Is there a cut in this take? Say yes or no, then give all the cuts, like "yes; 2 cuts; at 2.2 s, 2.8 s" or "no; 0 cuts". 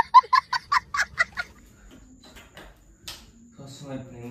no; 0 cuts